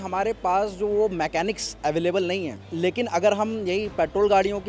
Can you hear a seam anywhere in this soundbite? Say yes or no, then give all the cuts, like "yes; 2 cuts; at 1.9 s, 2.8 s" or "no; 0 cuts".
yes; 1 cut; at 2.6 s